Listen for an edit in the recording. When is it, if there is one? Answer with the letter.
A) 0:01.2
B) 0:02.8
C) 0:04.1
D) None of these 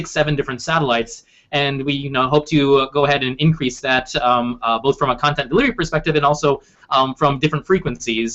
B